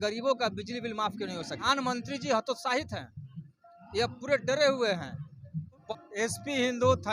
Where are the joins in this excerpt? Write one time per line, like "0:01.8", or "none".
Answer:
0:01.6
0:05.8